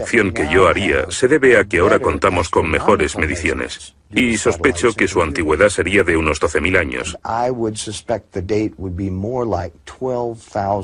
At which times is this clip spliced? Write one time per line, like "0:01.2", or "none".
none